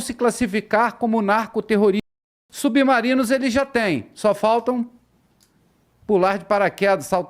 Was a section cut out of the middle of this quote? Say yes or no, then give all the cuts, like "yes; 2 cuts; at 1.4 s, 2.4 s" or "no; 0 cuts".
yes; 1 cut; at 2.4 s